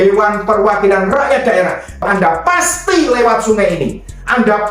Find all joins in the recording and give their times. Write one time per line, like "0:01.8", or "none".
0:02.0